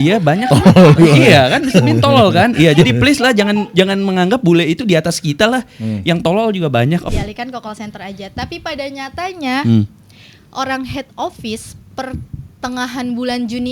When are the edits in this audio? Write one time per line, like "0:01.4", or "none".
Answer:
0:07.1